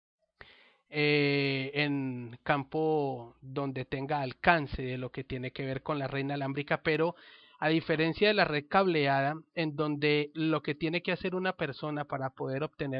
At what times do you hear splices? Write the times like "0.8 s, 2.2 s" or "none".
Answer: 1.1 s